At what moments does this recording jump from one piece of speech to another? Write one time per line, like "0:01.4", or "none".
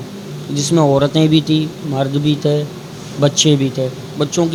none